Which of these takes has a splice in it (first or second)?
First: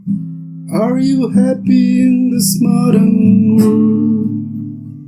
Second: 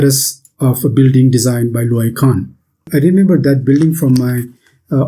second